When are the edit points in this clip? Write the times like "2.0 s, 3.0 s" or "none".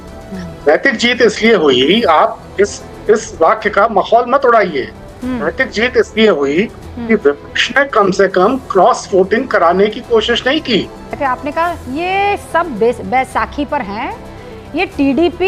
11.2 s